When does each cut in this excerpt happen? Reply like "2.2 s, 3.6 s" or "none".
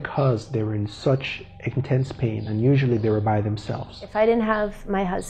4.1 s